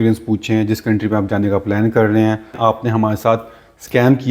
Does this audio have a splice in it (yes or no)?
yes